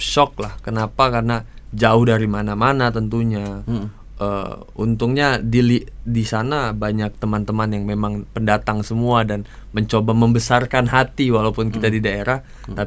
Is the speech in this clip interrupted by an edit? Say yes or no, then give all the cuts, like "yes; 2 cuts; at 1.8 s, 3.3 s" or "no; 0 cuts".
no; 0 cuts